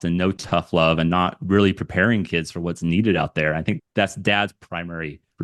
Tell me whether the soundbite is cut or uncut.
cut